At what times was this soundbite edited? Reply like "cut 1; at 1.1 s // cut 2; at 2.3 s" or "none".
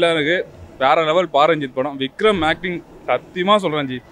none